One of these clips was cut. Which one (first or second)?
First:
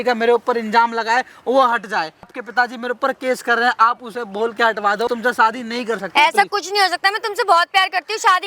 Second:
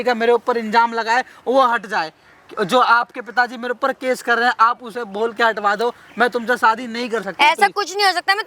first